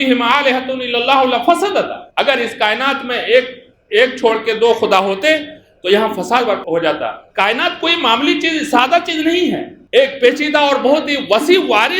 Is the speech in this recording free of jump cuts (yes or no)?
no